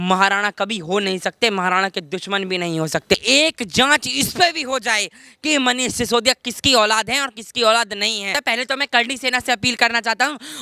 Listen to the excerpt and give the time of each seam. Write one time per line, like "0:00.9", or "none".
0:03.1
0:08.3